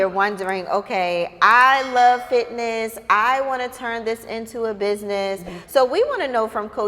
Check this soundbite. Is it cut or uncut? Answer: cut